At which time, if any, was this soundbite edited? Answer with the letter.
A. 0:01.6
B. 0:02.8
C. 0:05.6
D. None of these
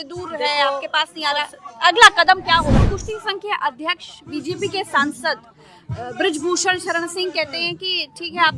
B